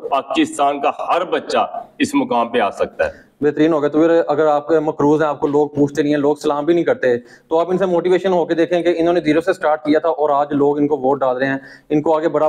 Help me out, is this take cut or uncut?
uncut